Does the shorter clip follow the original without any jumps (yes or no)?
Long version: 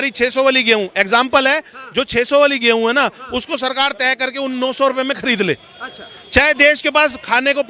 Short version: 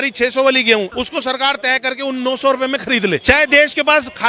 no